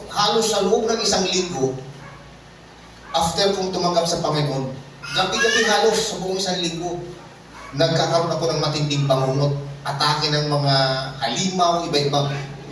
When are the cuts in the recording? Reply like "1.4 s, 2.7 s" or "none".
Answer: none